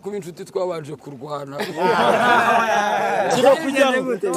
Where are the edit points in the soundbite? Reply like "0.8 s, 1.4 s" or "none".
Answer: none

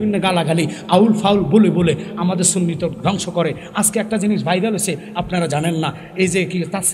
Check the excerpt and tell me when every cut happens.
none

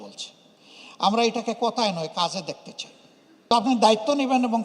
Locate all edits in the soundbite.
3.5 s

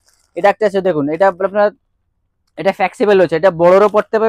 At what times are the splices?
none

